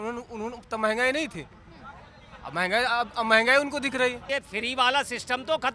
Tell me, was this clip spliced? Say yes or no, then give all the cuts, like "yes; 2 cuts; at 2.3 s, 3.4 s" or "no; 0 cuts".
yes; 1 cut; at 4.2 s